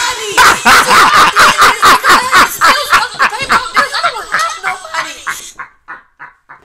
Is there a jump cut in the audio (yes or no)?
no